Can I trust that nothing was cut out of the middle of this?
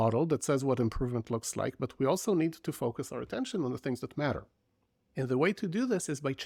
yes; 0 cuts

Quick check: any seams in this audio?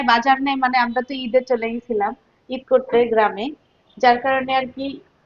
no; 0 cuts

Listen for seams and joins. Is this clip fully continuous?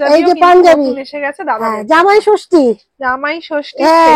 yes; 0 cuts

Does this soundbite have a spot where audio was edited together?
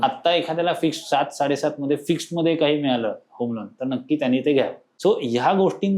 yes; 1 cut; at 4.8 s

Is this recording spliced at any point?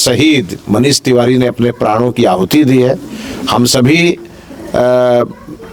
no; 0 cuts

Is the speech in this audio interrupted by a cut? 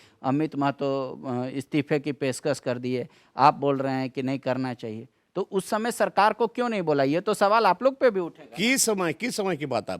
no; 0 cuts

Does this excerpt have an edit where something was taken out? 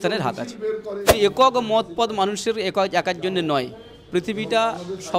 yes; 1 cut; at 1.1 s

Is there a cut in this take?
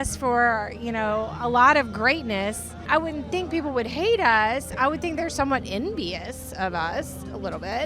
yes; 1 cut; at 2.8 s

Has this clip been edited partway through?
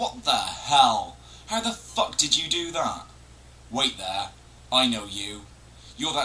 yes; 1 cut; at 0.9 s

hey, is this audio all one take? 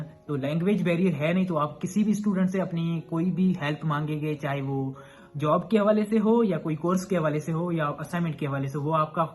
yes; 0 cuts

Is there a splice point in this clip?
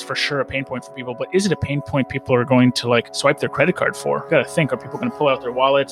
yes; 2 cuts; at 3.1 s, 4.3 s

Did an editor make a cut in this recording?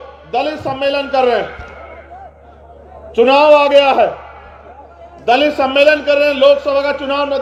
no; 0 cuts

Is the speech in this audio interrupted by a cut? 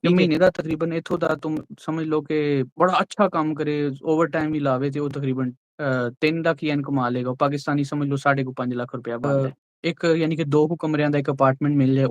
yes; 1 cut; at 9.2 s

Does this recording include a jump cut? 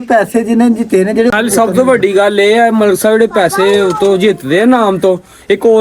yes; 1 cut; at 1.3 s

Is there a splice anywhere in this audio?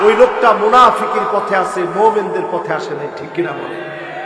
no; 0 cuts

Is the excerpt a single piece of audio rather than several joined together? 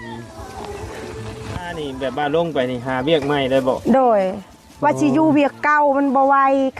no; 1 cut; at 1.7 s

